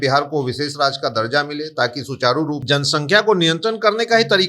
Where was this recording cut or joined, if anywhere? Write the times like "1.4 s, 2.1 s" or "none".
2.6 s